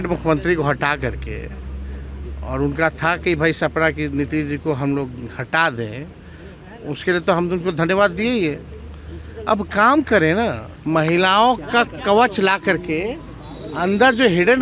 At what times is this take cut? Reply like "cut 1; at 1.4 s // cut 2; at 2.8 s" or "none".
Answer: cut 1; at 10.7 s